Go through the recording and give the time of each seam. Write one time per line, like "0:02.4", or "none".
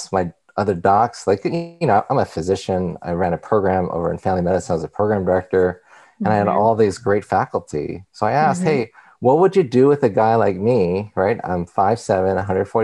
none